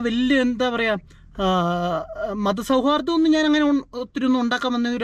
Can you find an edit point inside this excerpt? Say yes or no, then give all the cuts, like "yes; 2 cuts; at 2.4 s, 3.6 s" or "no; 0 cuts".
no; 0 cuts